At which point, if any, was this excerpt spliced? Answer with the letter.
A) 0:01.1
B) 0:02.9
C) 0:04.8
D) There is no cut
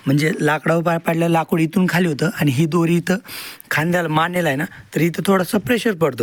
D